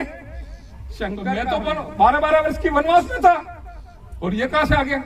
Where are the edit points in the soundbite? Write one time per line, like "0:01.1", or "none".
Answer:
0:01.4